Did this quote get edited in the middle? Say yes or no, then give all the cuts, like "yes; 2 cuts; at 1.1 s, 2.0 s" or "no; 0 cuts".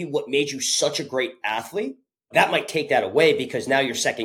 no; 0 cuts